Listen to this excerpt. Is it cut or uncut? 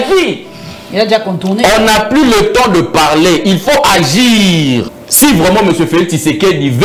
cut